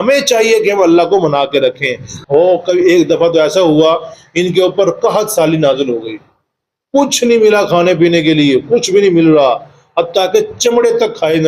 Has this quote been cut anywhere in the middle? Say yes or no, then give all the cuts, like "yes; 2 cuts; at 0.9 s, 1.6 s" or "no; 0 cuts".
yes; 1 cut; at 2.1 s